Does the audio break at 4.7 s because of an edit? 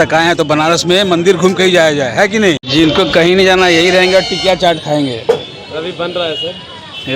no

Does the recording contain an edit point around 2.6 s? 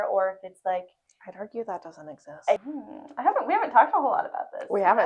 yes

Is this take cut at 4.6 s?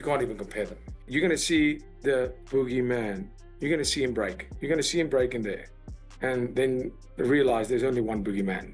no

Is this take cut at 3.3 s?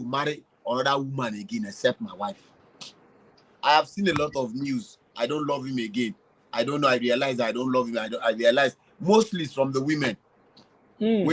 yes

